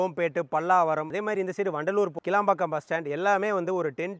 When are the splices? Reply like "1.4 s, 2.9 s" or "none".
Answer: 1.1 s, 2.2 s